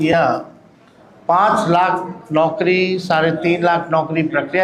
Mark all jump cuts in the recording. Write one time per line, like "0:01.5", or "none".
none